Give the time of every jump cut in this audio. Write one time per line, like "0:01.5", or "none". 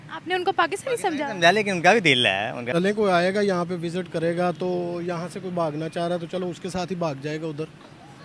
0:02.7